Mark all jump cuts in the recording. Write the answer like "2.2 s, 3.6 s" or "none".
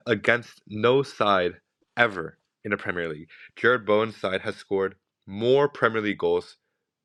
none

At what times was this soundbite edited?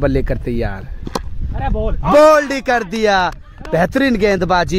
none

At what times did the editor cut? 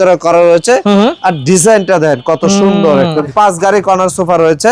3.3 s

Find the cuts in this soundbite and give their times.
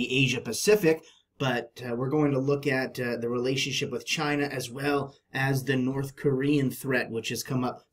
7.0 s

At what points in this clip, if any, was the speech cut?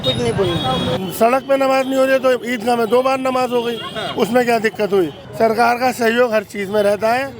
1.0 s, 5.2 s

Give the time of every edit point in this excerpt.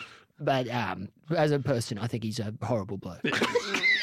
1.2 s

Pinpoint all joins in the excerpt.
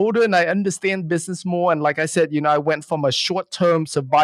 none

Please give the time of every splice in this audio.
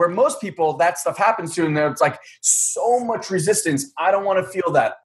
none

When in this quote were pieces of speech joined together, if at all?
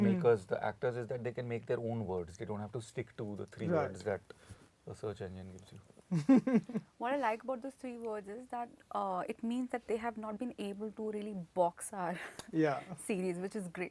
none

